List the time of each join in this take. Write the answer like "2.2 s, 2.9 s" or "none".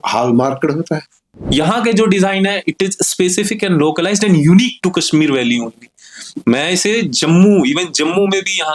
1.4 s